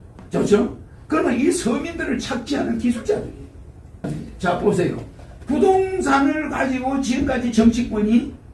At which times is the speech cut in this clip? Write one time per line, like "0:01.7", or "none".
0:04.1